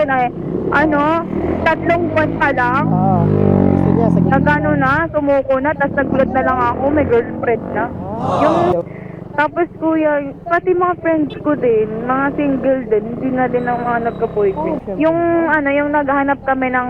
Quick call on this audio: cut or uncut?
cut